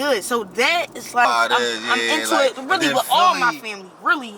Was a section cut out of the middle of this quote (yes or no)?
yes